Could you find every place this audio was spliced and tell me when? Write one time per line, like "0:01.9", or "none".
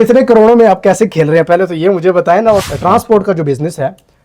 0:02.7